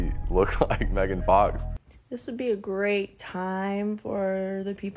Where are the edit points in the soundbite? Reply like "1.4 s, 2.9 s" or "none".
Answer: 1.7 s